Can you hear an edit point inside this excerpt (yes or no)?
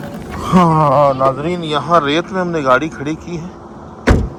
no